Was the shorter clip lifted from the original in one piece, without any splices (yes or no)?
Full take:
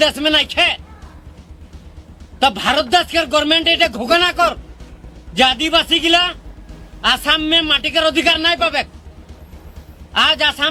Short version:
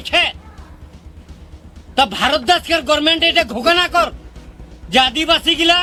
yes